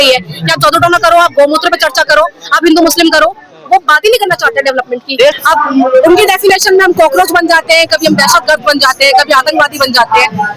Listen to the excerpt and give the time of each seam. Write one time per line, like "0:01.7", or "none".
0:05.4